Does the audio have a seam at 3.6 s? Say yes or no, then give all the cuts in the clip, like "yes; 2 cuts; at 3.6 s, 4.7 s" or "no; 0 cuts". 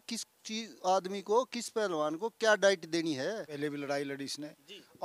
yes; 1 cut; at 3.6 s